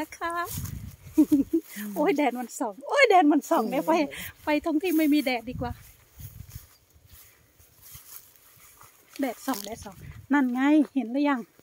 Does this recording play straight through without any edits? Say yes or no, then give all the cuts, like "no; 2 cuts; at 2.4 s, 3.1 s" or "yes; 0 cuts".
yes; 0 cuts